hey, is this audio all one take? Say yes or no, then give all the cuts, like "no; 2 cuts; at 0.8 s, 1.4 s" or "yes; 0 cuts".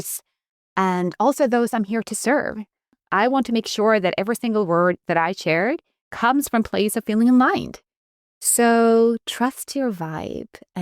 no; 1 cut; at 3.0 s